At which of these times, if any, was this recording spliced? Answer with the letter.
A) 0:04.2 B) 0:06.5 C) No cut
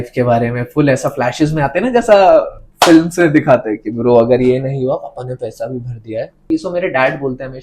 B